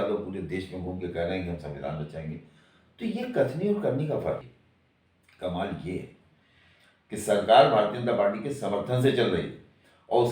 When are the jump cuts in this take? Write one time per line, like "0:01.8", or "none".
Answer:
0:04.5